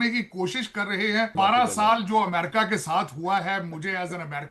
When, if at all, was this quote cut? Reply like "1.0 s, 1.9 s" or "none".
1.3 s